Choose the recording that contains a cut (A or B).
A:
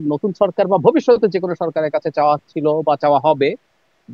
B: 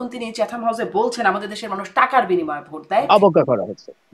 B